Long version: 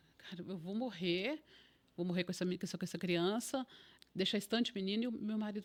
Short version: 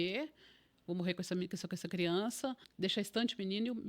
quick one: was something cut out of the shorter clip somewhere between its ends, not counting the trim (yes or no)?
yes